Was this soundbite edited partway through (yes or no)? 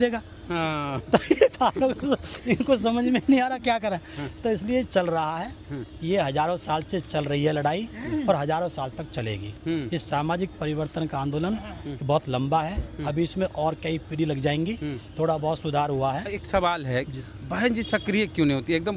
no